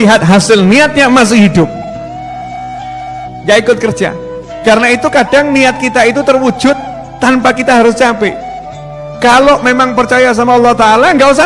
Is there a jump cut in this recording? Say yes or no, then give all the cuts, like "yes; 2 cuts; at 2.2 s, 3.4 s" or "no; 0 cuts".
no; 0 cuts